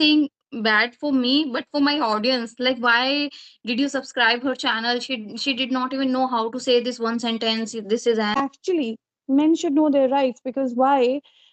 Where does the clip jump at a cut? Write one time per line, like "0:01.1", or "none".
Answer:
0:08.3